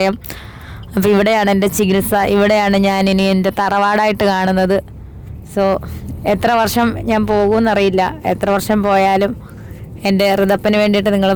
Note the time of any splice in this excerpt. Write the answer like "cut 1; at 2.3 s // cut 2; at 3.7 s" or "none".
none